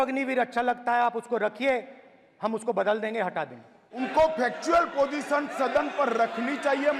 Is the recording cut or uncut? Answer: cut